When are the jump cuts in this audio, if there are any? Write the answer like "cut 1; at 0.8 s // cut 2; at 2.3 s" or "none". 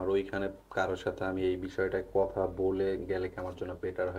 none